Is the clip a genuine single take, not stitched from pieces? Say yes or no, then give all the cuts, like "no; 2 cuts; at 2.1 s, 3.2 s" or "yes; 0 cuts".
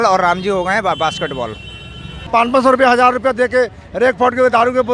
no; 1 cut; at 2.1 s